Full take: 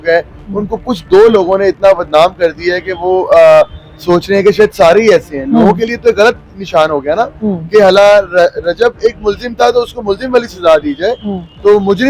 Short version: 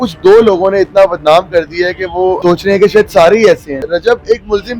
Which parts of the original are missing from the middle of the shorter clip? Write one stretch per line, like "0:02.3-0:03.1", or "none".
0:03.2-0:04.0
0:05.4-0:08.5